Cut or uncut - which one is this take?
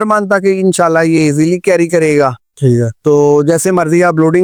uncut